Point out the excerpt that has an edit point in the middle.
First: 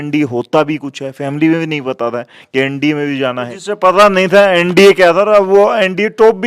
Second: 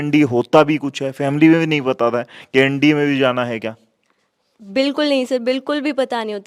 first; 1 cut; at 3.5 s

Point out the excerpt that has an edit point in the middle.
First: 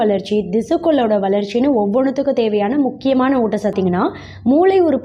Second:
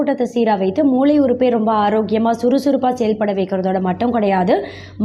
first; 1 cut; at 3.7 s

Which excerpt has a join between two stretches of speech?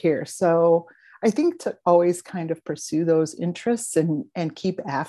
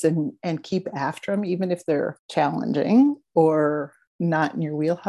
second; 2 cuts; at 2.2 s, 4.0 s

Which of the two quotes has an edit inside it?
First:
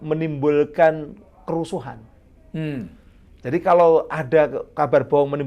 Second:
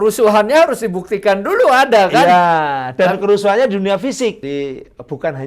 second; 1 cut; at 4.4 s

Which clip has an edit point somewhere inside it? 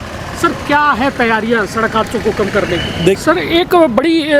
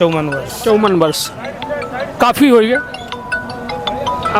first; 1 cut; at 3.2 s

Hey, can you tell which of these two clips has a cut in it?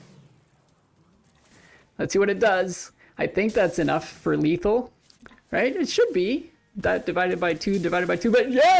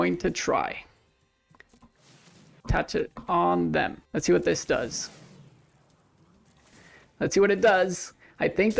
second; 3 cuts; at 1.6 s, 2.6 s, 4.0 s

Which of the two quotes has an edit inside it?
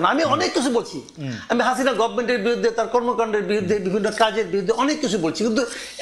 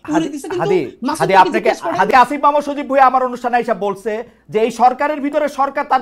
second; 1 cut; at 2.1 s

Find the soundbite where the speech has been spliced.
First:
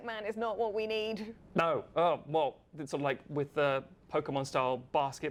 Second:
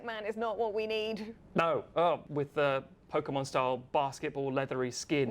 second; 1 cut; at 2.2 s

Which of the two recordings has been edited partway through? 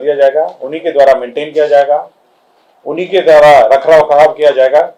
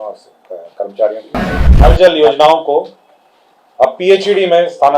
second; 1 cut; at 1.8 s

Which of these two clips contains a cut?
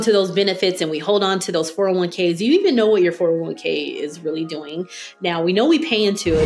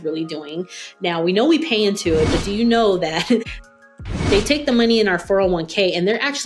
second; 1 cut; at 3.9 s

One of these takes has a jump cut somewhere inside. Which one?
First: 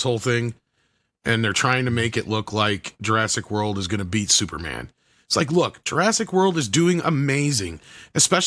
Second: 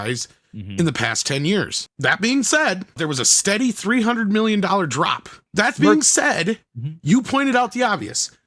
second; 3 cuts; at 1.8 s, 3.0 s, 5.4 s

